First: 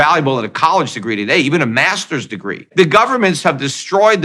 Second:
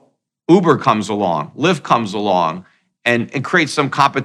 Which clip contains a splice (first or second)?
first